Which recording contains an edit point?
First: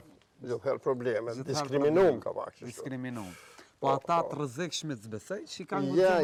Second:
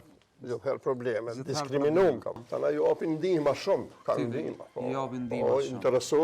second; 1 cut; at 2.4 s

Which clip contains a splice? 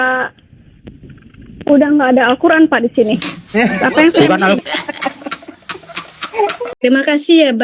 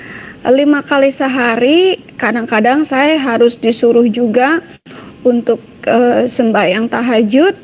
first; 1 cut; at 6.7 s

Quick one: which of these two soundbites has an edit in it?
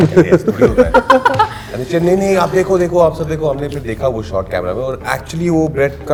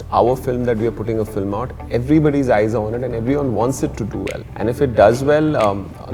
second; 1 cut; at 4.4 s

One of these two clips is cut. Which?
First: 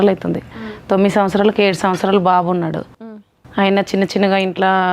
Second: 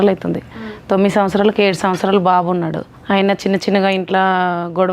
second; 1 cut; at 2.9 s

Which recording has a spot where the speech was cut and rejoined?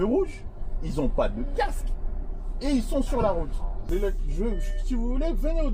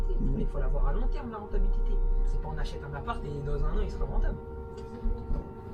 first; 1 cut; at 3.8 s

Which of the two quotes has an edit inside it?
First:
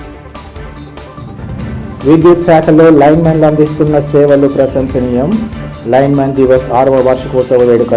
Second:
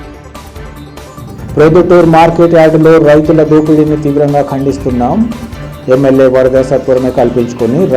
second; 1 cut; at 1.2 s

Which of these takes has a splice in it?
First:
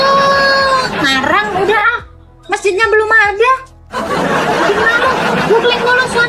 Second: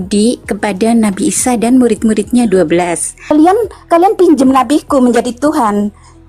second; 1 cut; at 3.3 s

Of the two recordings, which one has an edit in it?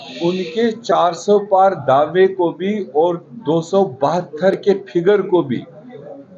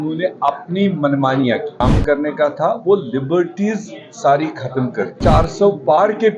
second; 2 cuts; at 1.8 s, 5.2 s

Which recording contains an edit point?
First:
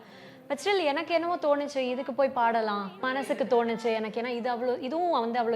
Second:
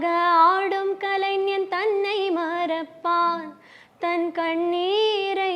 first; 1 cut; at 3.0 s

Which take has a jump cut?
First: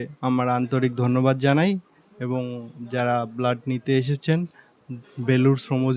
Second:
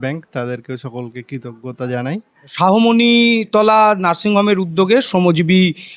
second; 1 cut; at 2.4 s

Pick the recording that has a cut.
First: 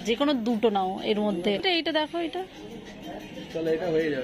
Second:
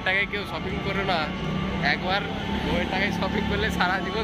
first; 1 cut; at 1.6 s

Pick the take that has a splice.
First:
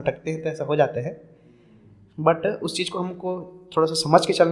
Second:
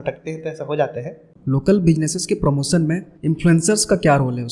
second; 2 cuts; at 1.3 s, 3.1 s

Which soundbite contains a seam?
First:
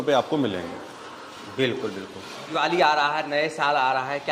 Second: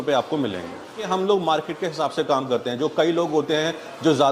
second; 1 cut; at 1.1 s

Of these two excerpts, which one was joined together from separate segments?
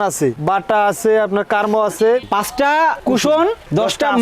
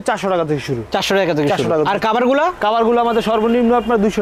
first; 1 cut; at 2.3 s

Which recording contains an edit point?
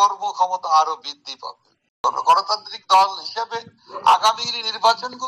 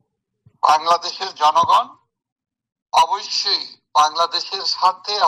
first; 1 cut; at 1.9 s

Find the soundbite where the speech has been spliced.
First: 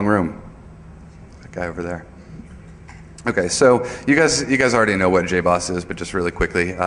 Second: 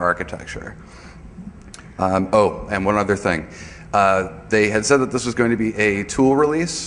first; 1 cut; at 4.4 s

